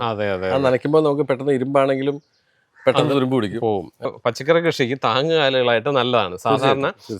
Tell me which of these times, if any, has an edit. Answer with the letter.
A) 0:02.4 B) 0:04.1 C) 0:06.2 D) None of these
B